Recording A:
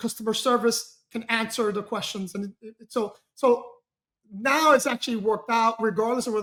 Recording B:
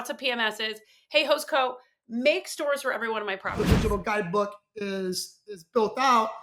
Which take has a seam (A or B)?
B